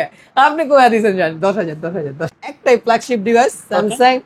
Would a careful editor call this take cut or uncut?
cut